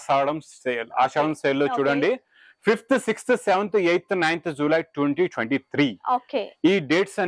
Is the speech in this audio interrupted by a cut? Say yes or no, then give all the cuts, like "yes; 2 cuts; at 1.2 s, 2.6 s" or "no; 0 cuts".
no; 0 cuts